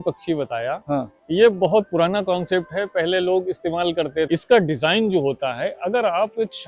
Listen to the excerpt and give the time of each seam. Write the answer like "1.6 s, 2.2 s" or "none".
4.3 s